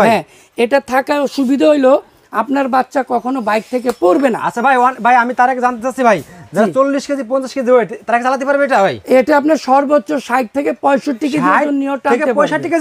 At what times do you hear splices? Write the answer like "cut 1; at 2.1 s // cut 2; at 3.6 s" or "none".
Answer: none